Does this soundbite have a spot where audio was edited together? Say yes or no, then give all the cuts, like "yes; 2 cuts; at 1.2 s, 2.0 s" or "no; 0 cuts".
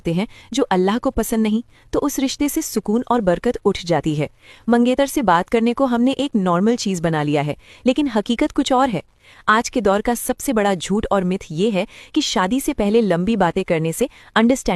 no; 0 cuts